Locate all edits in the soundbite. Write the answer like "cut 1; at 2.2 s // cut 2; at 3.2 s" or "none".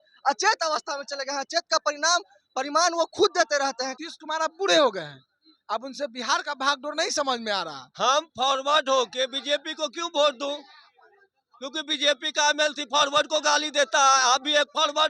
cut 1; at 3.9 s // cut 2; at 7.8 s